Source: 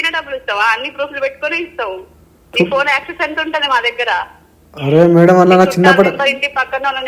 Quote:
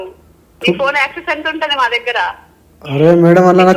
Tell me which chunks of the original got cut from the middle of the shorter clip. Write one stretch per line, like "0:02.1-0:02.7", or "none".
none